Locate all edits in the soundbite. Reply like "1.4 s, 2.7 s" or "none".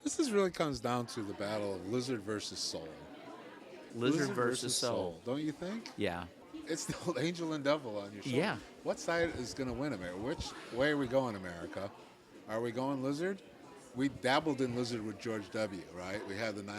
3.8 s

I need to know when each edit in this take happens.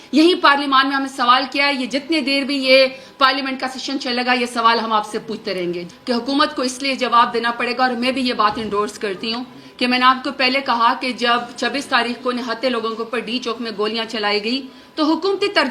5.8 s

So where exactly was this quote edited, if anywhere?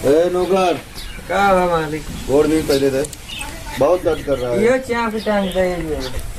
none

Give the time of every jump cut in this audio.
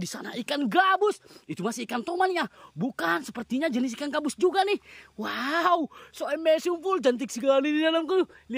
none

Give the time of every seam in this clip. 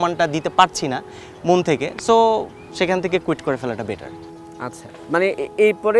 none

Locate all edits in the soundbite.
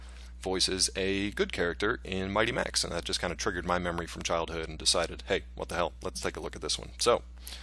none

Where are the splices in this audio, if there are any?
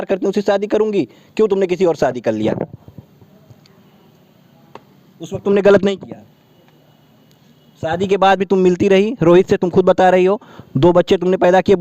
none

